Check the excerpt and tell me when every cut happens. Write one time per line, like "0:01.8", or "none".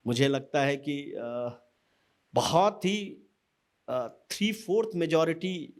none